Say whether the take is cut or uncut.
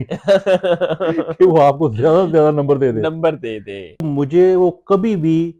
cut